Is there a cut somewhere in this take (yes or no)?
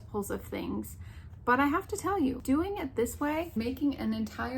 yes